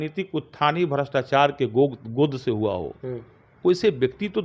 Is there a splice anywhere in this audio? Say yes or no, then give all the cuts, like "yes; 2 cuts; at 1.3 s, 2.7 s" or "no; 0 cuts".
no; 0 cuts